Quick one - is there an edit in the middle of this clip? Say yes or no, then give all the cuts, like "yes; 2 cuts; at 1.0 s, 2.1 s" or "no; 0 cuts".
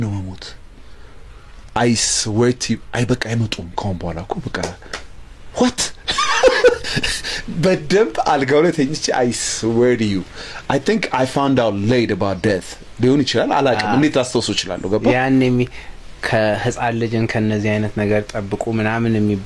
no; 0 cuts